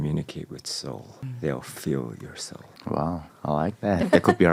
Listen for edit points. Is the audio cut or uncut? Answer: uncut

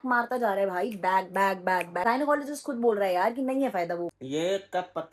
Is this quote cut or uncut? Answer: cut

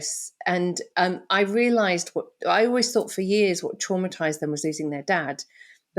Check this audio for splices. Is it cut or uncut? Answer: uncut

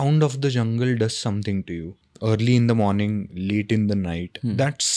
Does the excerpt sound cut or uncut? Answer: cut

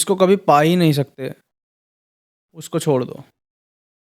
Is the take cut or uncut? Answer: uncut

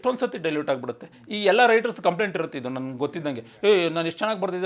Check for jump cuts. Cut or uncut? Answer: uncut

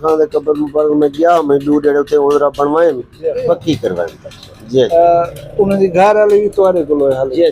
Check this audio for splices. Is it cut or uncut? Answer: cut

